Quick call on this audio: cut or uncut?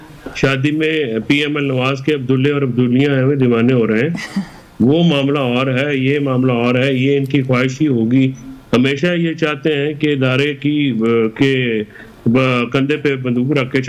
uncut